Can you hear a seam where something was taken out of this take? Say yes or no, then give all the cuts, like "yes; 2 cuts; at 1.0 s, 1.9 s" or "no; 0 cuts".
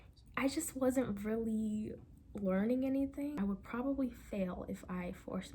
yes; 1 cut; at 3.4 s